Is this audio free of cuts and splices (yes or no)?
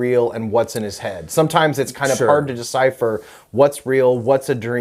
yes